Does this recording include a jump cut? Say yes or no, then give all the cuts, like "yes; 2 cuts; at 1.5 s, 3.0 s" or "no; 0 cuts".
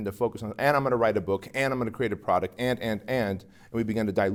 no; 0 cuts